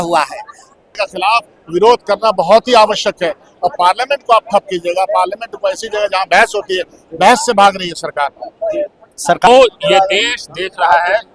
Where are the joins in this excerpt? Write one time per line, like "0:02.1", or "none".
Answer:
0:01.0
0:09.5